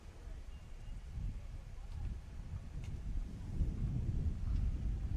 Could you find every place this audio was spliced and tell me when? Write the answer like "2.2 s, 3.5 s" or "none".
2.5 s